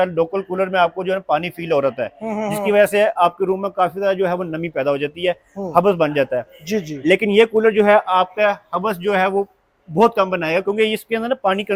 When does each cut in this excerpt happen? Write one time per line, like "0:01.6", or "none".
none